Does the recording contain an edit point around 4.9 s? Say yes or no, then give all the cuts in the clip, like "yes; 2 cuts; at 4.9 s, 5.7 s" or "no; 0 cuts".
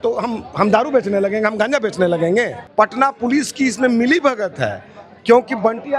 no; 1 cut; at 2.6 s